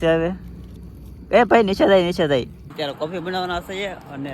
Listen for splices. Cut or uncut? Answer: cut